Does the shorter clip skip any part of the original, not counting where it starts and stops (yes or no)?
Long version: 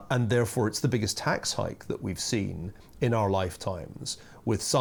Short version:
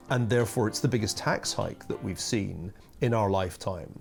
no